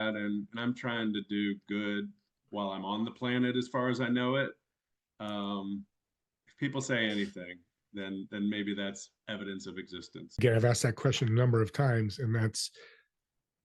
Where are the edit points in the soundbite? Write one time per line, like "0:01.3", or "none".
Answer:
0:10.4